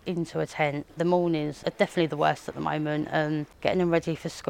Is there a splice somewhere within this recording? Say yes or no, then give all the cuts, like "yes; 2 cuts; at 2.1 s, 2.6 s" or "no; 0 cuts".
yes; 3 cuts; at 0.9 s, 1.5 s, 3.5 s